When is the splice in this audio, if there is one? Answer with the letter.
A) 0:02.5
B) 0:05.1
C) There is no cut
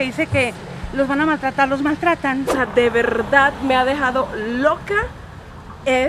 A